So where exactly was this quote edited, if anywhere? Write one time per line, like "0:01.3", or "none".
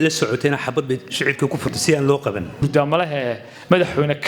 0:02.6